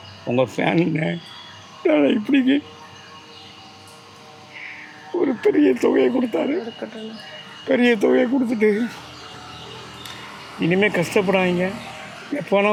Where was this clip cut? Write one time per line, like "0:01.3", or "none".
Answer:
none

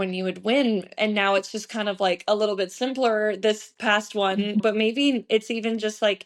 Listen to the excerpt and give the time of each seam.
0:04.6

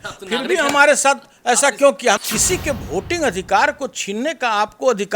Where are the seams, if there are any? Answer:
0:02.2

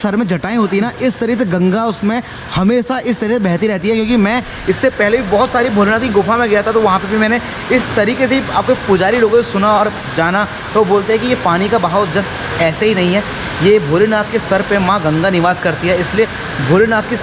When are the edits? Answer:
none

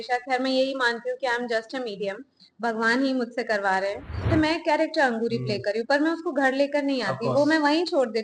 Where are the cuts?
0:04.2

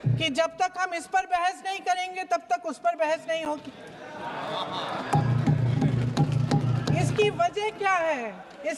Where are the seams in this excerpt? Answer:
none

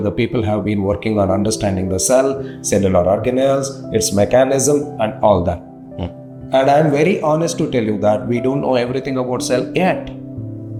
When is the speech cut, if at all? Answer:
none

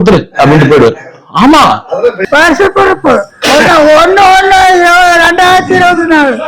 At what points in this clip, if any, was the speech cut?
0:02.2

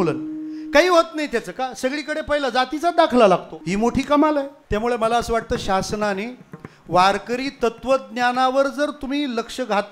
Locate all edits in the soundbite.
0:03.5
0:04.6

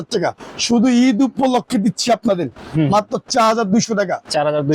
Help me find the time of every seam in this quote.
0:02.7

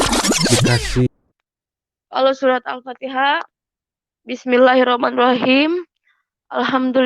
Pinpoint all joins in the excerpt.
0:01.1

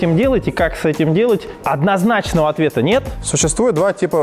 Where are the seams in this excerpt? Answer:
0:01.5
0:03.2

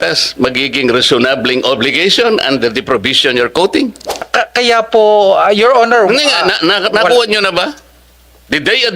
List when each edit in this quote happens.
0:04.3

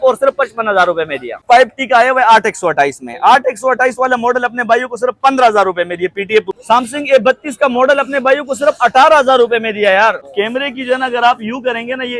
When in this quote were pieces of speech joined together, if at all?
0:01.4
0:06.5
0:10.2

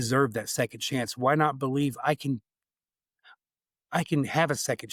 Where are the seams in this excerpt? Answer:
none

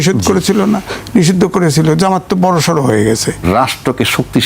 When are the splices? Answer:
0:03.3

